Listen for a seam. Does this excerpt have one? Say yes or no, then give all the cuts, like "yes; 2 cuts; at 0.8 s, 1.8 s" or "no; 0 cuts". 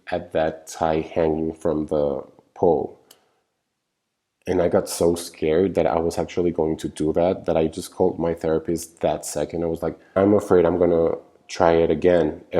yes; 1 cut; at 10.2 s